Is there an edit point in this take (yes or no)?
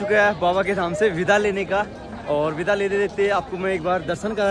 no